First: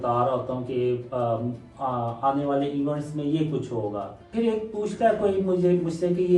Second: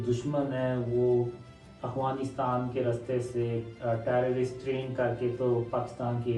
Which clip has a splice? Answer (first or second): first